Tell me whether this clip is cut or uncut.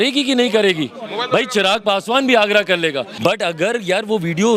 cut